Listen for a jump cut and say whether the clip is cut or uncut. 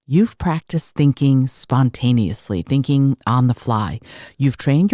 uncut